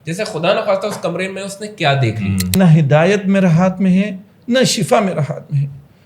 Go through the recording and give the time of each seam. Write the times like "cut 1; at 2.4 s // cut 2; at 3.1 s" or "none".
cut 1; at 2.5 s